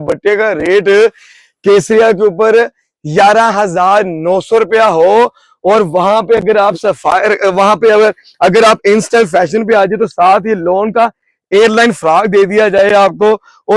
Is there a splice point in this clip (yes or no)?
no